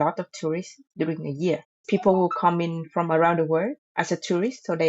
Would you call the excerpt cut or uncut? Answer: cut